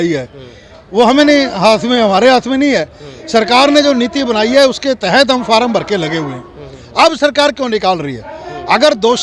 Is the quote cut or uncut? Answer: uncut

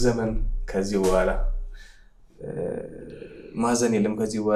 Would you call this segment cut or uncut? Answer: uncut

